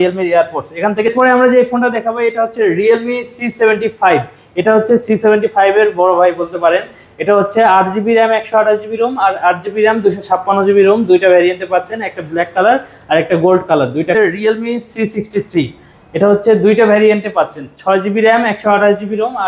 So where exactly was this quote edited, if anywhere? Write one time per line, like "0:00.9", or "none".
0:01.1
0:14.1